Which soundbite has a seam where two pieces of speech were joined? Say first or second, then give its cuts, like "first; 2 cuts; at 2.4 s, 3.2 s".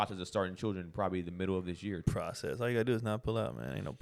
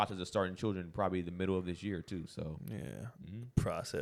first; 1 cut; at 2.0 s